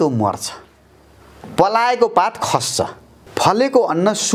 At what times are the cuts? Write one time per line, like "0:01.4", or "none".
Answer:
0:03.2